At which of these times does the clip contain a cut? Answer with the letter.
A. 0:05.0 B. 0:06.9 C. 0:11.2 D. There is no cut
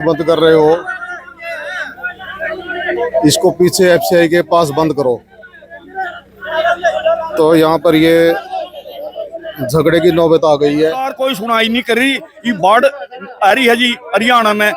C